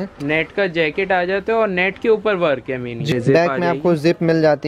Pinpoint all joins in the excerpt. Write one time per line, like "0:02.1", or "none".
0:03.1